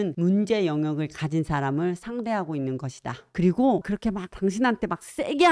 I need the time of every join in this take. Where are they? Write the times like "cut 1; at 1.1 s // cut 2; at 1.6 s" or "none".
cut 1; at 3.3 s